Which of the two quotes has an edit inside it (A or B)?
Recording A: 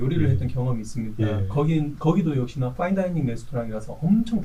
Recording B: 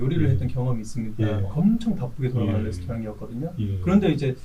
B